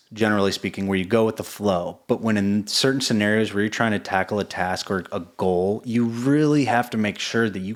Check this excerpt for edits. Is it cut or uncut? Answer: uncut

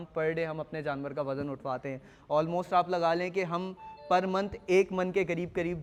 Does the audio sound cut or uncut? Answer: uncut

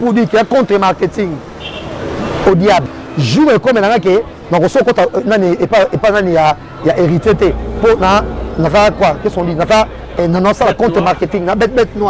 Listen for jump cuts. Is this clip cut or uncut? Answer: cut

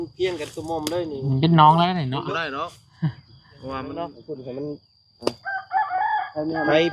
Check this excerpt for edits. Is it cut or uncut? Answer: cut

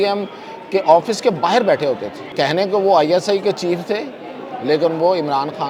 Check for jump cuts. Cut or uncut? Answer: cut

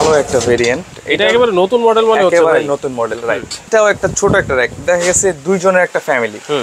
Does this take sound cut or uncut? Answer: cut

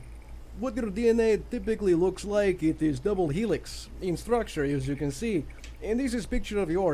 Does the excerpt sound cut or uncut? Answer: uncut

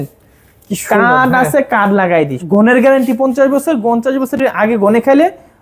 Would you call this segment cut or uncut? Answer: cut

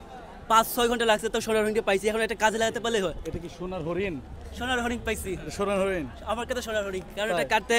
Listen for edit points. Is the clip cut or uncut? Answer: uncut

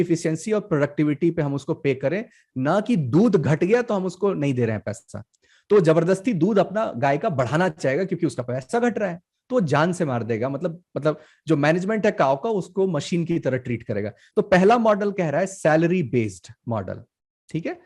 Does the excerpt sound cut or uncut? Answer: uncut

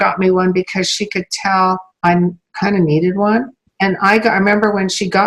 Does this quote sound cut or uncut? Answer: cut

